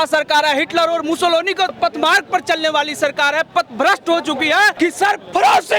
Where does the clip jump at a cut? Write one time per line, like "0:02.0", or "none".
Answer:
0:01.8
0:04.7